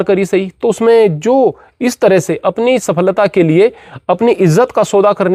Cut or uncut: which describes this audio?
uncut